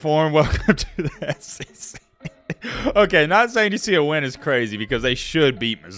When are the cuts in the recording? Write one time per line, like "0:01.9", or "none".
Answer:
none